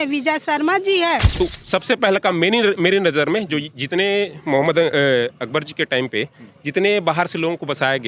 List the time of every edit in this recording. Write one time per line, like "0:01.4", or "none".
0:01.3